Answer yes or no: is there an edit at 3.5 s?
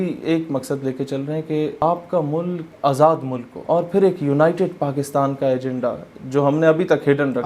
yes